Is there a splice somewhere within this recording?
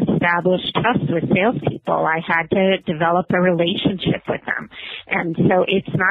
no; 0 cuts

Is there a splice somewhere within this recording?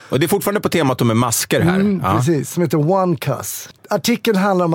yes; 1 cut; at 3.6 s

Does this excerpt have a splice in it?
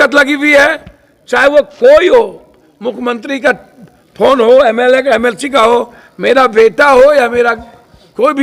no; 0 cuts

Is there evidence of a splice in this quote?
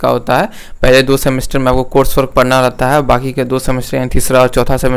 no; 0 cuts

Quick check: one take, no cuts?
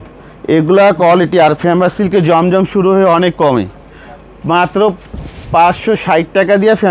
yes; 0 cuts

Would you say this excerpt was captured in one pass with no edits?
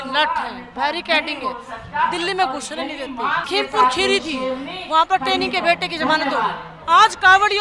no; 2 cuts; at 3.5 s, 6.7 s

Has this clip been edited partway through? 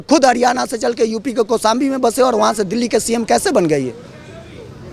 no; 0 cuts

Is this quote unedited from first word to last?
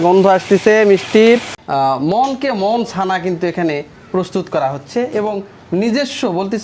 no; 1 cut; at 1.6 s

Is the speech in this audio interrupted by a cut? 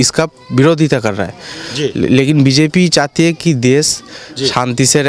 no; 0 cuts

